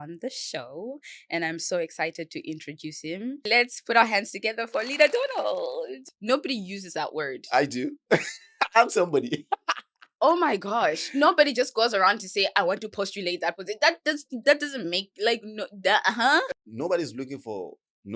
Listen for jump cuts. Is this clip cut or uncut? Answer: cut